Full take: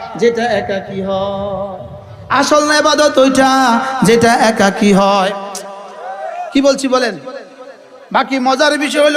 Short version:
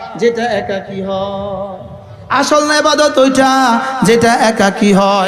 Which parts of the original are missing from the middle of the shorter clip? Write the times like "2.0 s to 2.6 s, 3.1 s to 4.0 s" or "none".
none

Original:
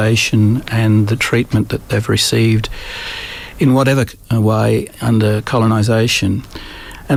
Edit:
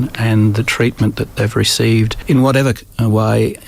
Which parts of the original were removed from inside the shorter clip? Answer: 2.7 s to 3.5 s

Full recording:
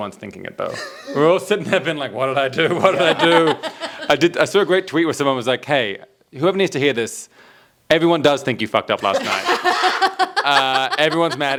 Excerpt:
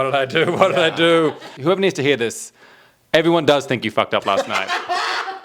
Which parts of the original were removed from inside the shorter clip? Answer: 3.7 s to 6.2 s

